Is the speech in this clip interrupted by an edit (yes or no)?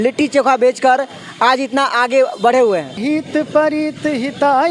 yes